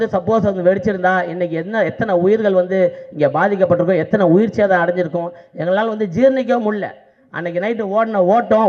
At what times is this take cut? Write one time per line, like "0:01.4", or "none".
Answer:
none